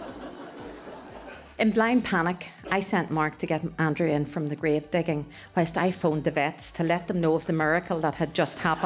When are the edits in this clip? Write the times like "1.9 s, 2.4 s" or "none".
1.4 s, 3.7 s